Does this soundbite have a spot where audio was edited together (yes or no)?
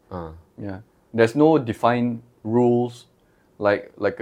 no